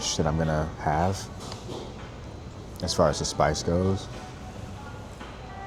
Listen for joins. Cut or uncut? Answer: uncut